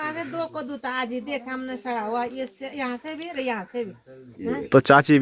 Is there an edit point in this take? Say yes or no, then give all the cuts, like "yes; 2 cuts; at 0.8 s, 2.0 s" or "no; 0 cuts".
no; 0 cuts